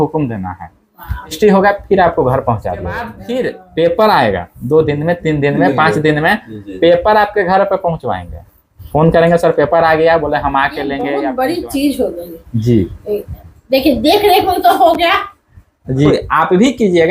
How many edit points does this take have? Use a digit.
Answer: 4